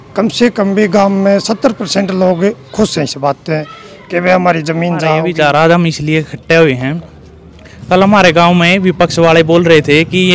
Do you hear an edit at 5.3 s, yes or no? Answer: yes